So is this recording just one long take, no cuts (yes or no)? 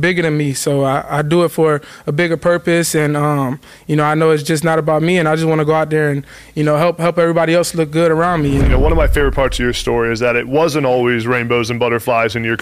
no